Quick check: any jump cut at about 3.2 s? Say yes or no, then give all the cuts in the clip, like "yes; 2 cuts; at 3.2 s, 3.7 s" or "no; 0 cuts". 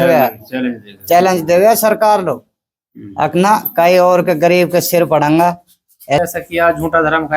no; 1 cut; at 6.2 s